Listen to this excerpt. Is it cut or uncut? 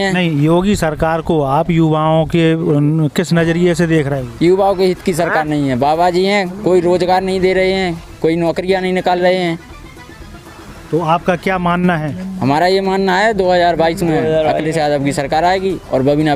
uncut